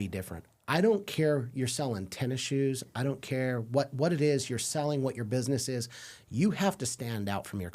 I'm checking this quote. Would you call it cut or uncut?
uncut